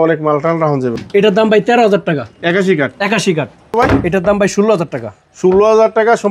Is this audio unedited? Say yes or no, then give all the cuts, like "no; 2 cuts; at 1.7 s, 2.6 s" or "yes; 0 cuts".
no; 2 cuts; at 1.0 s, 3.8 s